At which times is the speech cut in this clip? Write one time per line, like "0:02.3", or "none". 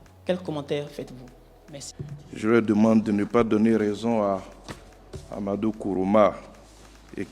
0:01.9

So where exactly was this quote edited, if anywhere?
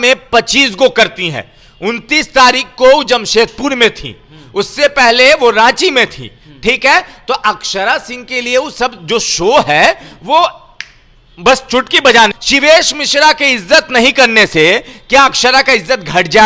0:12.3

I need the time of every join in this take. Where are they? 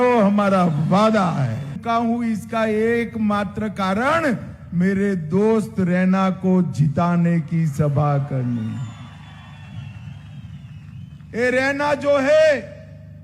0:01.8

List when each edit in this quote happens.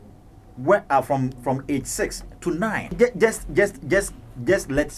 0:02.9

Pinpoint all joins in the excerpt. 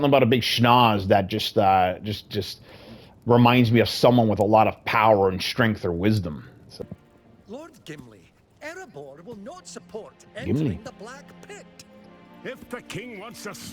0:06.8

